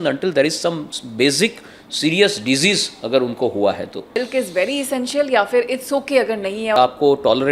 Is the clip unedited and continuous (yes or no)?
no